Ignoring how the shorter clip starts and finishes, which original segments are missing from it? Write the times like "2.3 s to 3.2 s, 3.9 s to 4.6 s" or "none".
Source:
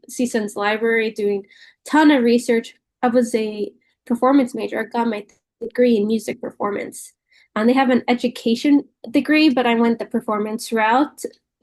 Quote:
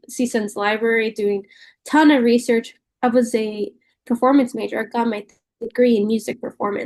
none